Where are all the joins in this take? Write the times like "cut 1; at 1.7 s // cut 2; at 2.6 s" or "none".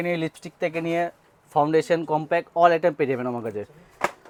none

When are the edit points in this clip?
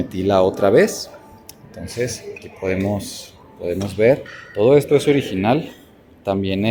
none

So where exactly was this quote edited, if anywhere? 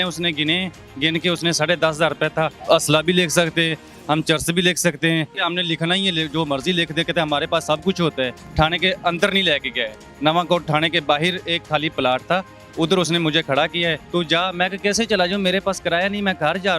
cut 1; at 2.6 s // cut 2; at 5.4 s // cut 3; at 8.4 s // cut 4; at 14.0 s

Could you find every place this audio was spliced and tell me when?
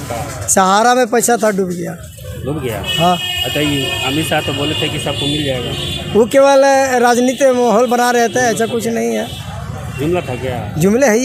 none

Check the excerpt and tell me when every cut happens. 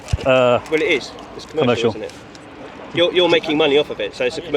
none

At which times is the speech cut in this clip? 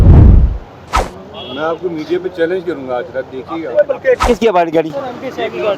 cut 1; at 4.2 s

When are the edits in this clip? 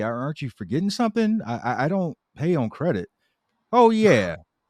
none

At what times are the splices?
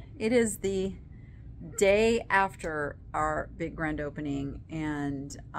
none

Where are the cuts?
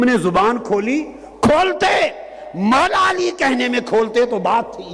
none

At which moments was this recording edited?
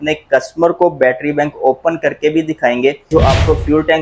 cut 1; at 3.1 s

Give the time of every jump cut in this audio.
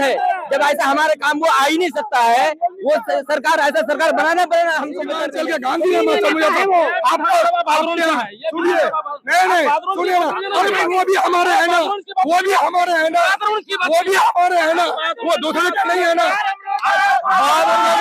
cut 1; at 5.3 s

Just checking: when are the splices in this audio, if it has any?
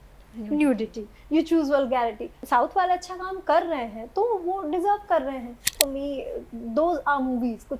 cut 1; at 2.4 s // cut 2; at 5.7 s

